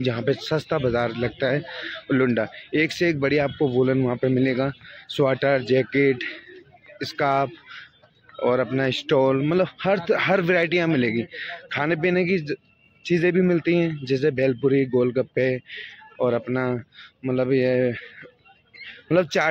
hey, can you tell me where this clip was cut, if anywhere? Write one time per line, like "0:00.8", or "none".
none